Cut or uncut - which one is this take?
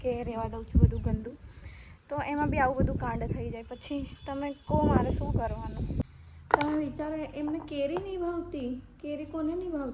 cut